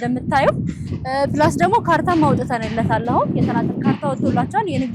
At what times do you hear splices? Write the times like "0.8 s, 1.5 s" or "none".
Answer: none